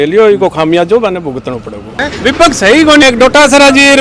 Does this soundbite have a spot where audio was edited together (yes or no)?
yes